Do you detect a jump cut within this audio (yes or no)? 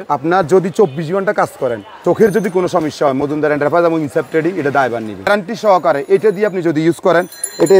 yes